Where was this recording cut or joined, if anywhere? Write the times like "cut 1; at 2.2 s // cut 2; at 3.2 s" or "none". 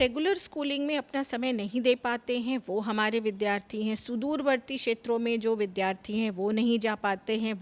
none